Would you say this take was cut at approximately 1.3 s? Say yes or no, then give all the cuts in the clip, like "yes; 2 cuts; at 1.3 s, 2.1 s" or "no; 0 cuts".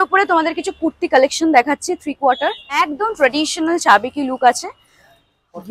no; 1 cut; at 2.9 s